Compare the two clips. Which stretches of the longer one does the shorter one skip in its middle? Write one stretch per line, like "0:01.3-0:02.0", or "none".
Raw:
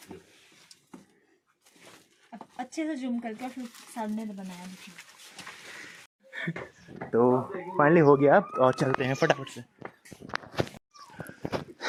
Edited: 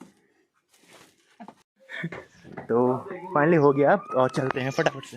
0:02.5-0:06.0